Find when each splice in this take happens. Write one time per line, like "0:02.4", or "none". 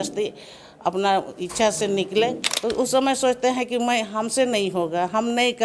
0:02.5